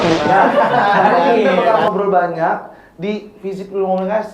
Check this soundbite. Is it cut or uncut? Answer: cut